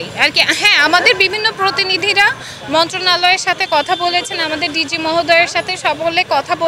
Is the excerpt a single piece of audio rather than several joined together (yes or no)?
yes